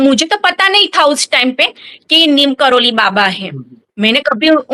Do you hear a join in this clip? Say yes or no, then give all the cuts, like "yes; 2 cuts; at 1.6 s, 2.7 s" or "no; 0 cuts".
no; 0 cuts